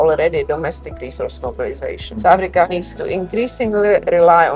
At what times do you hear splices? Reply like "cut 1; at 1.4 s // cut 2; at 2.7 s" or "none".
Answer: none